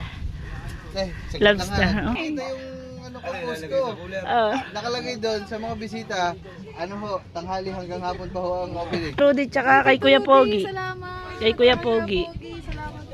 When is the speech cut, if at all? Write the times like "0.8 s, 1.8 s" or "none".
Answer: 2.2 s, 9.2 s